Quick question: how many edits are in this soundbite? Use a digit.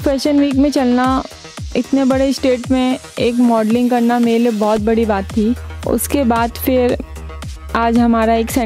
1